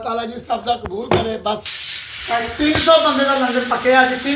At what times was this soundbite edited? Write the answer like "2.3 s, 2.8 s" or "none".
1.8 s